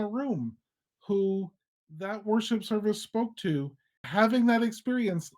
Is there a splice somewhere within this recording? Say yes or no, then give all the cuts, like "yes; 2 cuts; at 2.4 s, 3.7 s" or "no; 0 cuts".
yes; 1 cut; at 3.9 s